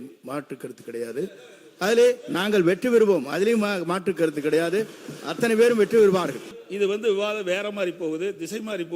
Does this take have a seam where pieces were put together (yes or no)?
yes